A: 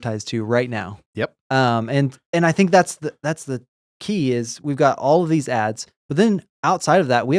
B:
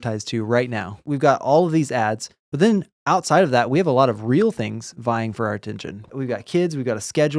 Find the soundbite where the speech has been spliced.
B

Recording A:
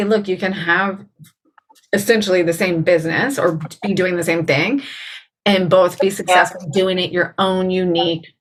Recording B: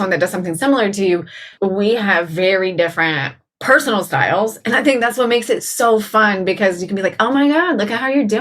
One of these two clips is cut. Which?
B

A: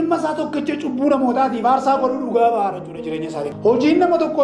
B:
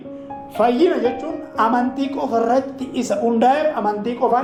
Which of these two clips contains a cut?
A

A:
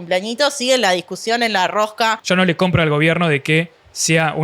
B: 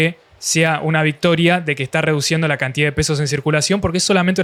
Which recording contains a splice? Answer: A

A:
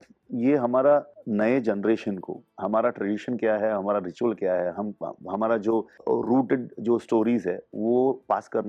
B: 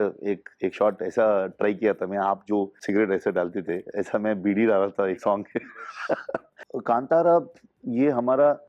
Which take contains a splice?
B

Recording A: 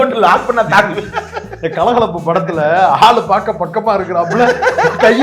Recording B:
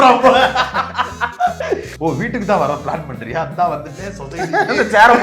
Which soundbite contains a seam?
B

